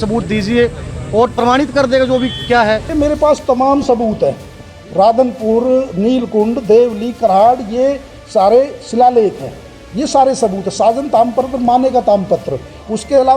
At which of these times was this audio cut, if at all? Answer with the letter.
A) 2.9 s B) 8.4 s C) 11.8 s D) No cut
A